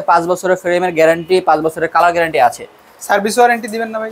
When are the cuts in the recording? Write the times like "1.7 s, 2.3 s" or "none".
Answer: none